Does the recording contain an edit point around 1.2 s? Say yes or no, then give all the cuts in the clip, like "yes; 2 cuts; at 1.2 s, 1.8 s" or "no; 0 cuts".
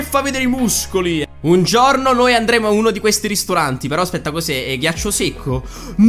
yes; 1 cut; at 1.2 s